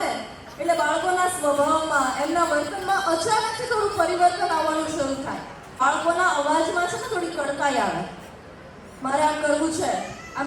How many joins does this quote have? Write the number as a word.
one